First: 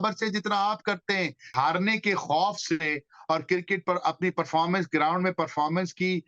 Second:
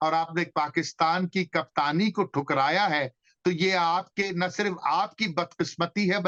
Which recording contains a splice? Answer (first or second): first